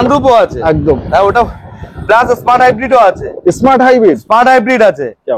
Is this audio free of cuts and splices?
yes; 0 cuts

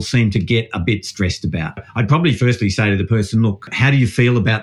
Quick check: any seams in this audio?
yes; 2 cuts; at 1.8 s, 3.7 s

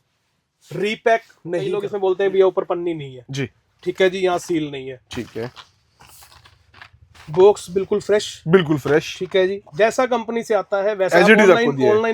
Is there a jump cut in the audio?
yes; 1 cut; at 1.9 s

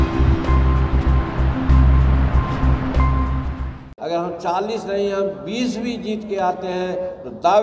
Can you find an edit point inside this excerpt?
yes; 1 cut; at 3.9 s

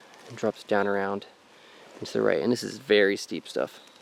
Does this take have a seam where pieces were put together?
no; 0 cuts

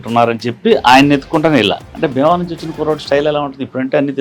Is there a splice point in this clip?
yes; 1 cut; at 1.9 s

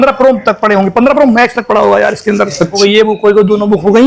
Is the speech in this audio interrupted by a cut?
yes; 1 cut; at 2.7 s

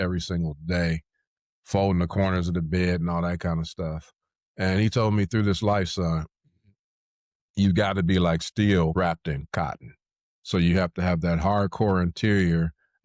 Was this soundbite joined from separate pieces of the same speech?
yes; 1 cut; at 8.9 s

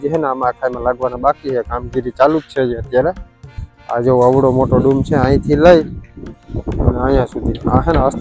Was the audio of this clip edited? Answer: no; 0 cuts

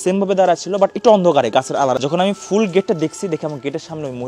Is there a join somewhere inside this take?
yes; 1 cut; at 2.0 s

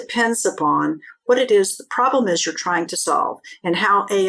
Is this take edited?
yes; 1 cut; at 1.2 s

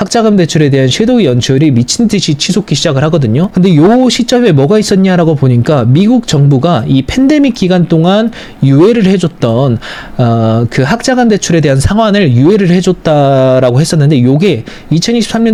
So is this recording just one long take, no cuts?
yes; 0 cuts

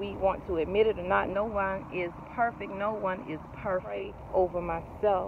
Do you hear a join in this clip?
yes; 1 cut; at 4.2 s

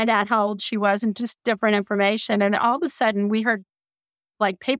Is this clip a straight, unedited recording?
yes; 0 cuts

